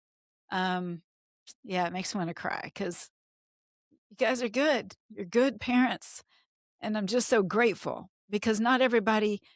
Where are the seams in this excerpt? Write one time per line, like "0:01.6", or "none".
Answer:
none

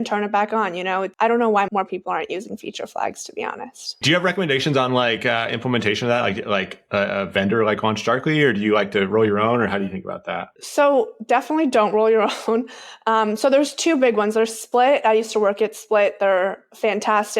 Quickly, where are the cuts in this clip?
0:01.1
0:01.7
0:04.0

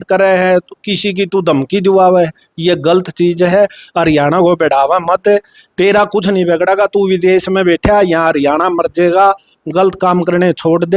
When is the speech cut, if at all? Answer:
none

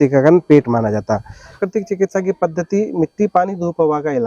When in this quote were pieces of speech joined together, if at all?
0:01.6

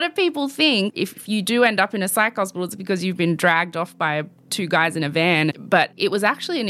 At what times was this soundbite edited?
0:00.9
0:04.4
0:06.0

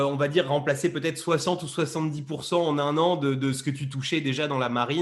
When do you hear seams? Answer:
none

